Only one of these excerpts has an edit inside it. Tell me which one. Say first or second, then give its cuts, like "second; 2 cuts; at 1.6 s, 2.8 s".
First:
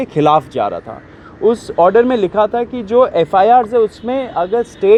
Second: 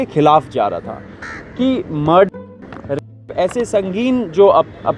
second; 1 cut; at 1.2 s